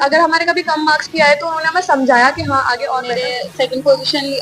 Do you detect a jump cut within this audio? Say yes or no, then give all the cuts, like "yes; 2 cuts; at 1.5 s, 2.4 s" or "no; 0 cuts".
yes; 1 cut; at 3.1 s